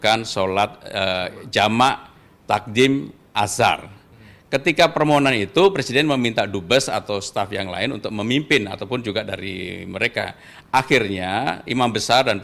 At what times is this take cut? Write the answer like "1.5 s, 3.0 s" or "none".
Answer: none